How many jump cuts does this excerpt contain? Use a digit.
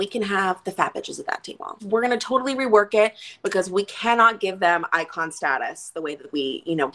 1